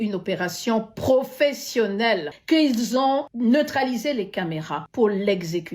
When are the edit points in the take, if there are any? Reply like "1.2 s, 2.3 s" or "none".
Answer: 2.3 s, 3.3 s, 4.8 s